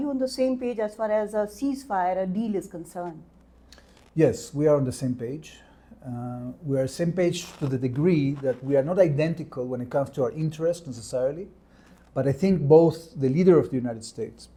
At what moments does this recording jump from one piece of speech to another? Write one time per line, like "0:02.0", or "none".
none